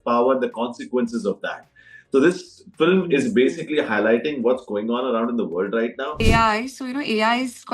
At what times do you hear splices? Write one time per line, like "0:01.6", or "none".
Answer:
0:06.1

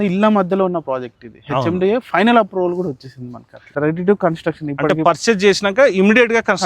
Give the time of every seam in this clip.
0:03.7

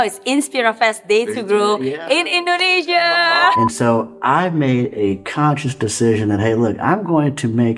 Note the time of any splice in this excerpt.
0:03.6

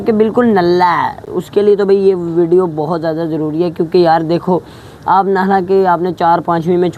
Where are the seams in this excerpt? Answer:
none

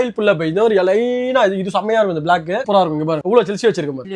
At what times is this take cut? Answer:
none

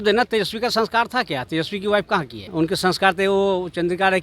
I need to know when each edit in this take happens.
0:02.5

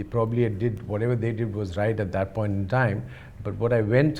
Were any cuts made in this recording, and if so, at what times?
none

